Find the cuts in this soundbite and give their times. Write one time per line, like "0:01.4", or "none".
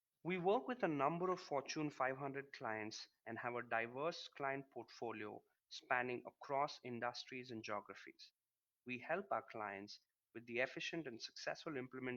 none